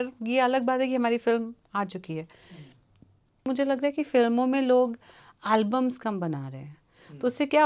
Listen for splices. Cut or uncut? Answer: cut